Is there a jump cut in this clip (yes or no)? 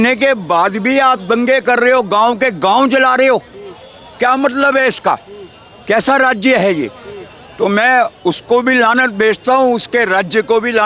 no